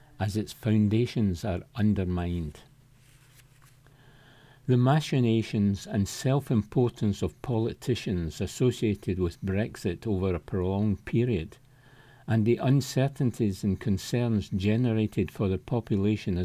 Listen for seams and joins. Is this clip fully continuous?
yes; 0 cuts

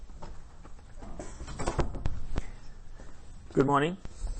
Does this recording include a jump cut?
yes; 1 cut; at 0.9 s

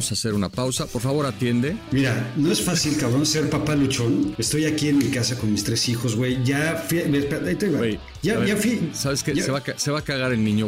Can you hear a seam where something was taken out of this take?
yes; 3 cuts; at 1.8 s, 4.3 s, 9.5 s

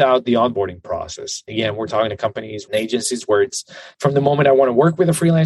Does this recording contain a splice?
yes; 1 cut; at 2.7 s

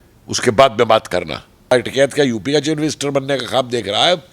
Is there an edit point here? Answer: yes; 1 cut; at 1.7 s

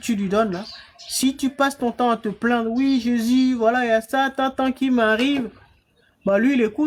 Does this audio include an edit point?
no; 0 cuts

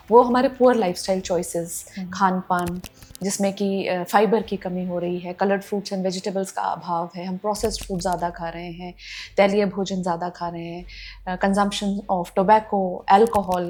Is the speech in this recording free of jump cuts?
yes; 0 cuts

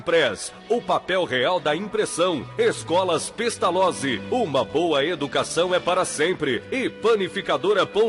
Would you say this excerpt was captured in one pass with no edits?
yes; 0 cuts

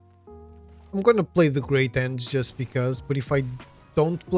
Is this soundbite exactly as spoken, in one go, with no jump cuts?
yes; 0 cuts

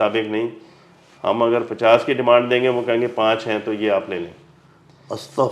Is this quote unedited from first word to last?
yes; 0 cuts

